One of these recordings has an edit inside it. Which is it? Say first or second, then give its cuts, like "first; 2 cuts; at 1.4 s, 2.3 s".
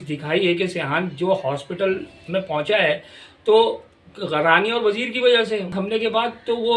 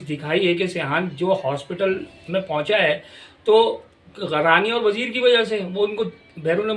first; 1 cut; at 5.7 s